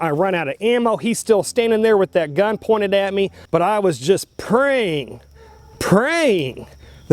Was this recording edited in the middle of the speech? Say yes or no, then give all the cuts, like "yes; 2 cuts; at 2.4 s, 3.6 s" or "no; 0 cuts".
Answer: yes; 1 cut; at 3.4 s